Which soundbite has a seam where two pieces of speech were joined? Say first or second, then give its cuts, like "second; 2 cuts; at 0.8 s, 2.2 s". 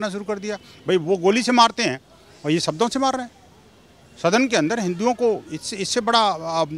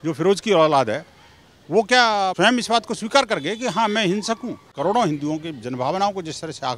second; 2 cuts; at 2.3 s, 4.7 s